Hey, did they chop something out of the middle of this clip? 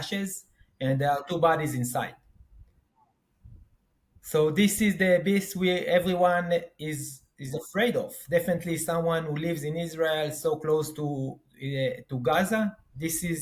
no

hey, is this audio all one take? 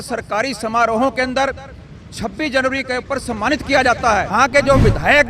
no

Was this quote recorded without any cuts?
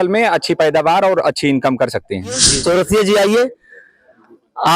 no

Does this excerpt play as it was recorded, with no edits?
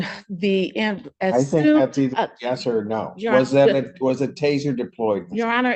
yes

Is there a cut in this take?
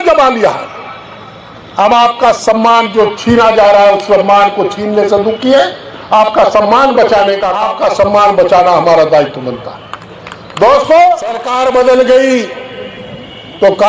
yes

